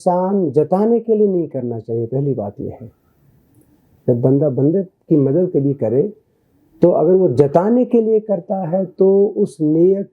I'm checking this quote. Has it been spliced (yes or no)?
no